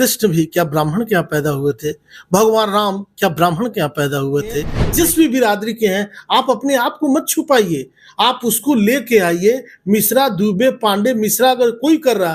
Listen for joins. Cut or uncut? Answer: cut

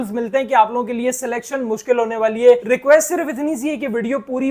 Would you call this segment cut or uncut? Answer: uncut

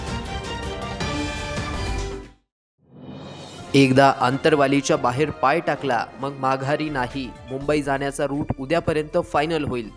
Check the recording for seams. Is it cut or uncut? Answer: cut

